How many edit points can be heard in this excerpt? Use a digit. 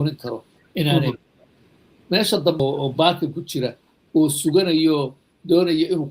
1